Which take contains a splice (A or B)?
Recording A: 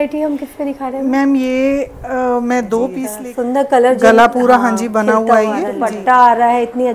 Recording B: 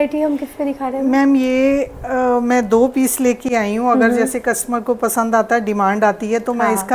A